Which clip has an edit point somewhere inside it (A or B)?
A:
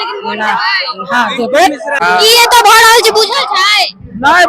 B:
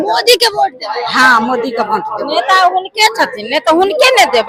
A